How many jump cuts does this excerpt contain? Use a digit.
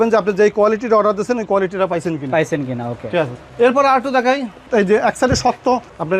0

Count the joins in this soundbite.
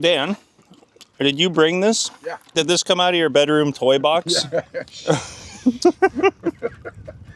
1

